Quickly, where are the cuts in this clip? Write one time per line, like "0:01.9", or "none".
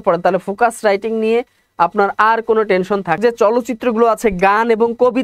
0:03.2

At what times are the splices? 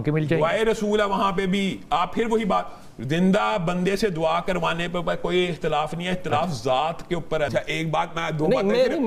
0:07.5

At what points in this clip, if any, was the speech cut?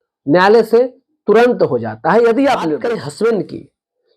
0:02.8

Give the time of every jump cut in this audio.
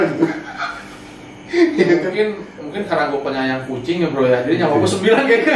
none

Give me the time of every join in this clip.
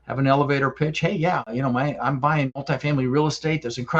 0:01.5
0:02.6

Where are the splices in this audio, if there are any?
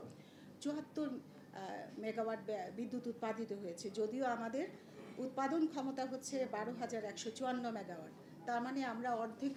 none

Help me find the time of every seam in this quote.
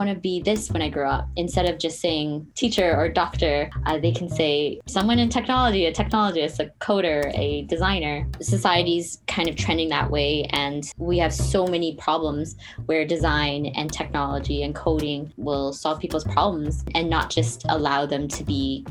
0:02.5
0:03.8
0:04.8
0:08.3
0:15.3
0:16.9

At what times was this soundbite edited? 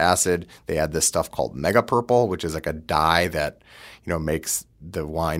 none

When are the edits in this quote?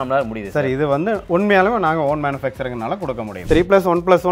0:03.4

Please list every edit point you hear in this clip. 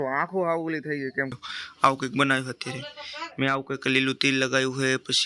0:01.4

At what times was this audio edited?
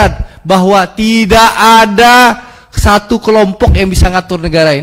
none

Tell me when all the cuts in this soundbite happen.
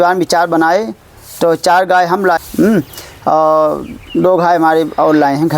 0:02.4

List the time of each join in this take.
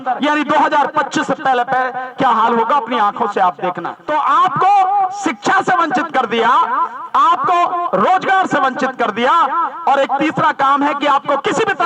0:03.9

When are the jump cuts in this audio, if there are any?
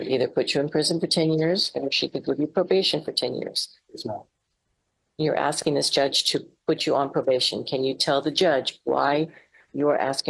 none

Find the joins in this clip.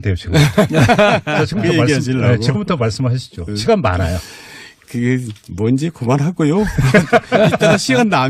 0:02.3

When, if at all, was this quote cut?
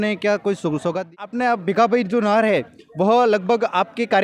0:01.2

